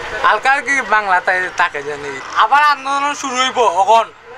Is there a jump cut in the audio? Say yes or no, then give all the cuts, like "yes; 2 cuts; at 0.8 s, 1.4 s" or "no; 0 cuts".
yes; 1 cut; at 2.2 s